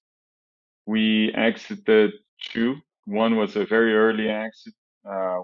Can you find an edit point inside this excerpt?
no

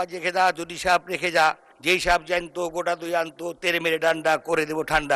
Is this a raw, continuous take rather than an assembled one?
yes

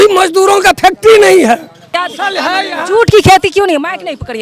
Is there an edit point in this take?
yes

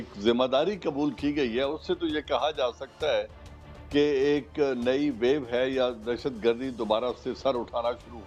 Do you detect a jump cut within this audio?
no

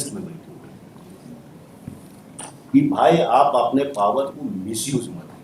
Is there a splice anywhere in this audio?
no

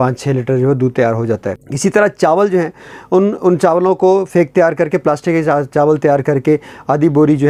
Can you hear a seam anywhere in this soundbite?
no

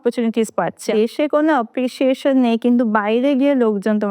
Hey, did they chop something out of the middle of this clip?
yes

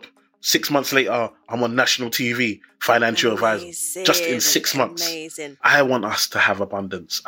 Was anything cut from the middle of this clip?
yes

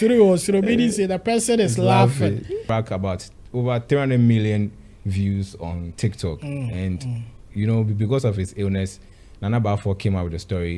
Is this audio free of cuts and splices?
no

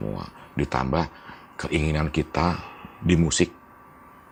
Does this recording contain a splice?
no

